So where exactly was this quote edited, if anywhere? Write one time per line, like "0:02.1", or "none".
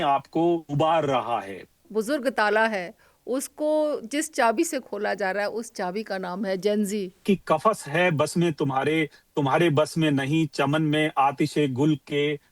0:01.8
0:07.2